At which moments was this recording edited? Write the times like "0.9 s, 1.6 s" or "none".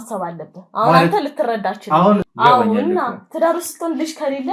2.3 s